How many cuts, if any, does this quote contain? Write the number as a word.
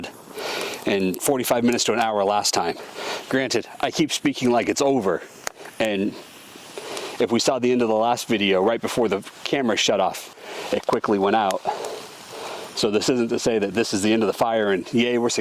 two